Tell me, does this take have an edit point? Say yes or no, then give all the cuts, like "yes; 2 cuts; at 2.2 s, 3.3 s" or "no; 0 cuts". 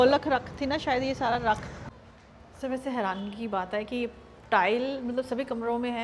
yes; 1 cut; at 1.8 s